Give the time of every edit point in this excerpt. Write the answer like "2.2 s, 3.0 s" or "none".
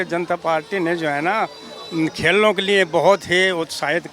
none